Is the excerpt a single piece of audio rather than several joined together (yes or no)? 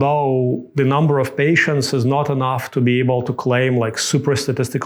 yes